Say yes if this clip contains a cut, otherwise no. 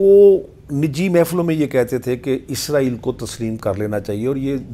no